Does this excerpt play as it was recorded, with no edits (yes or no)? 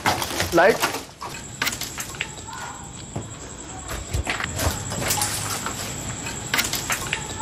yes